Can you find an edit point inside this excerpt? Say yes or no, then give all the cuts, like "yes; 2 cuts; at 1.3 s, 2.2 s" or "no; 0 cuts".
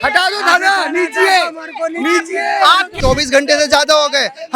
yes; 1 cut; at 3.0 s